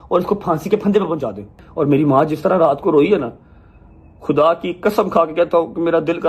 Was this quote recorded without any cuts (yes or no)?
no